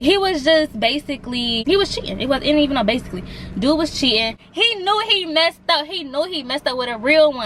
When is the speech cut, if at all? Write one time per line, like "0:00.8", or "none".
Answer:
0:01.6
0:04.4